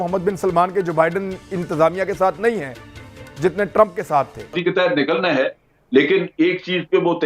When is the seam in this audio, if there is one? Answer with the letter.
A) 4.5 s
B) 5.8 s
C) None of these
A